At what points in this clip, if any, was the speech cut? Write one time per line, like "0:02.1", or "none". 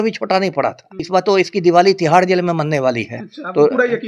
0:01.0